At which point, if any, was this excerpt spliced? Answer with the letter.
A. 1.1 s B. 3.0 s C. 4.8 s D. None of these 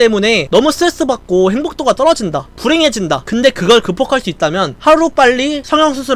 D